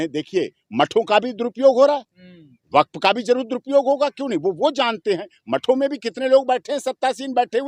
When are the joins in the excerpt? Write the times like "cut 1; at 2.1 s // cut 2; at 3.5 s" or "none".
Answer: none